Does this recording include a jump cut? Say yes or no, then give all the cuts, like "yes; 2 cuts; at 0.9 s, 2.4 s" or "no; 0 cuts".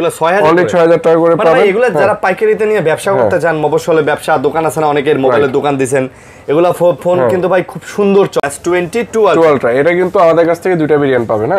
yes; 1 cut; at 8.4 s